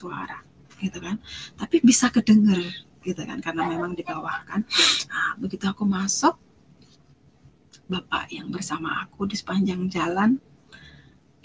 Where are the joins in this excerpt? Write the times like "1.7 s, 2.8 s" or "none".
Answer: none